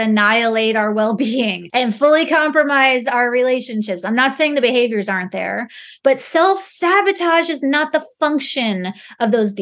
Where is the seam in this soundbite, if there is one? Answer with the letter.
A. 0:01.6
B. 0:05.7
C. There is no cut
A